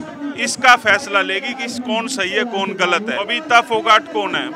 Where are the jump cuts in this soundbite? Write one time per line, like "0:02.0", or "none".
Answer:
0:03.4